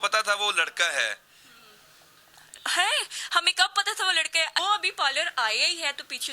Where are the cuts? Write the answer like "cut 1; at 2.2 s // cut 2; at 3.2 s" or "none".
cut 1; at 4.6 s